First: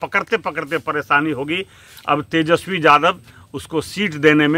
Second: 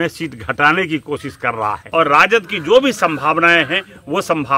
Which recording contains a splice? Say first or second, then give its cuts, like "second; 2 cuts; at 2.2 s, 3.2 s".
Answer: second; 1 cut; at 1.8 s